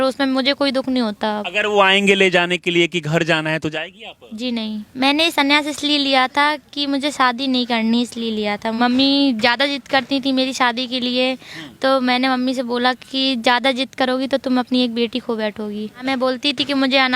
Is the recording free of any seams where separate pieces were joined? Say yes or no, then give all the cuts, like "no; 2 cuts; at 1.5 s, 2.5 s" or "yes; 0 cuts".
no; 4 cuts; at 1.5 s, 4.8 s, 8.8 s, 16.0 s